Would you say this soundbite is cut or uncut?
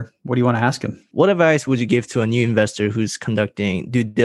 cut